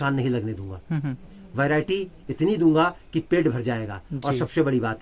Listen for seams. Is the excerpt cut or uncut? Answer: uncut